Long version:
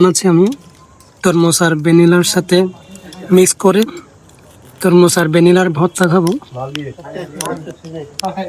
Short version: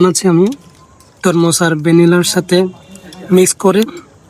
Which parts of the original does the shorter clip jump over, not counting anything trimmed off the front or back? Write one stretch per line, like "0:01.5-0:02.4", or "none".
none